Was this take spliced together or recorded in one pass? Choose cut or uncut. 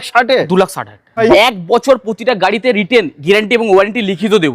cut